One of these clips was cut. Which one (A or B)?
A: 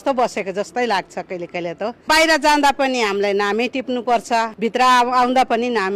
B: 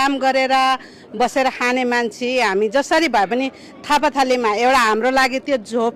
A